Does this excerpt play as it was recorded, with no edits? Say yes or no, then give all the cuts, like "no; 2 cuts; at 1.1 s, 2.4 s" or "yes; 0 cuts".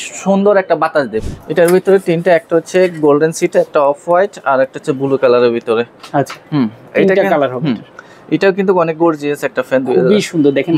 no; 1 cut; at 1.2 s